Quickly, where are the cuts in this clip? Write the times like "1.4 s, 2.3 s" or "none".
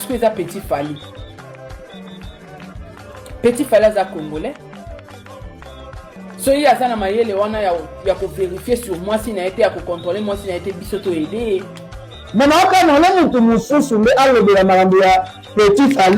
none